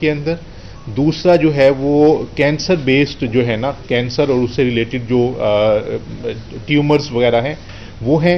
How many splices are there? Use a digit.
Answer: 0